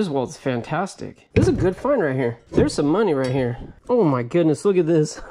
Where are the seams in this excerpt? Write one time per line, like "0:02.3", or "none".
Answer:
0:01.2
0:02.4
0:03.7